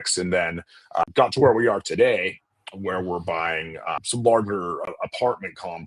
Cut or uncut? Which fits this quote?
cut